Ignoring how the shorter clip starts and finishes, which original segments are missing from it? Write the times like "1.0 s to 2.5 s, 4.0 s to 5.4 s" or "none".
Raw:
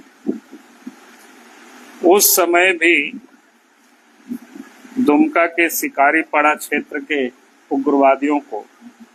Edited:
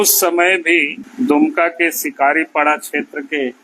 3.2 s to 4.8 s